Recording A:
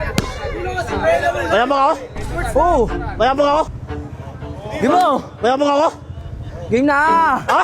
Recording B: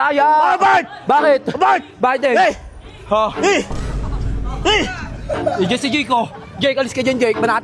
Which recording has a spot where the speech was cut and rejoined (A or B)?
A